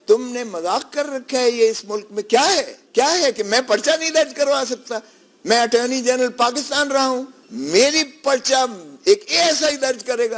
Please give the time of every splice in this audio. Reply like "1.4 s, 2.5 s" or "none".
2.8 s, 7.4 s